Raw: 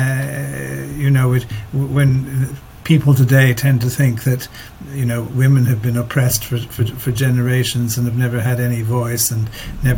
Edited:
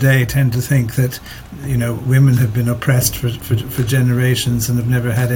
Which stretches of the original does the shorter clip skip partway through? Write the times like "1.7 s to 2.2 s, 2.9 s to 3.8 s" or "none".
none